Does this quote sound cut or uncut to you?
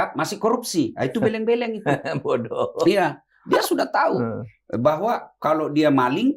uncut